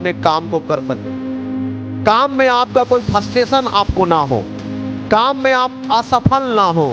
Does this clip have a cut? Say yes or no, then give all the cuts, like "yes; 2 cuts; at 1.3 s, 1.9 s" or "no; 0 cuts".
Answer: no; 0 cuts